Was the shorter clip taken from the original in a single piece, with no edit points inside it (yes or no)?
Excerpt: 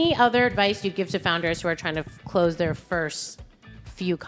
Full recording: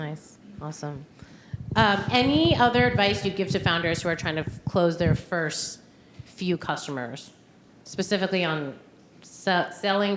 yes